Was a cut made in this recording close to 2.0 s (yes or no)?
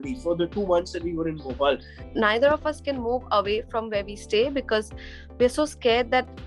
yes